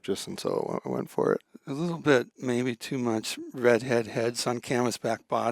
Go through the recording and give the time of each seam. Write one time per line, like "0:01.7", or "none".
none